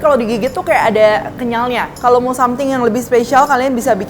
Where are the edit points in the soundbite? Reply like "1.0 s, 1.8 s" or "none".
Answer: 1.9 s